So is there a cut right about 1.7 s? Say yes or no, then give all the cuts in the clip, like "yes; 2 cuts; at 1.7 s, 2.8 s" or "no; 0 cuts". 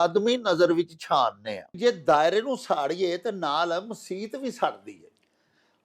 yes; 1 cut; at 1.7 s